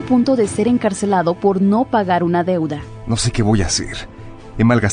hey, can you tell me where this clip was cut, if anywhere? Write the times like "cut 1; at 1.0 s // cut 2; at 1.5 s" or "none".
none